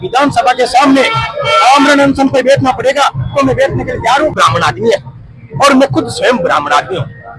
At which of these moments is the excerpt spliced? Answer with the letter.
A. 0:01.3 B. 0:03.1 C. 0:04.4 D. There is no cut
C